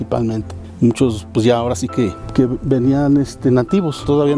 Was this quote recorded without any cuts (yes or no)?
yes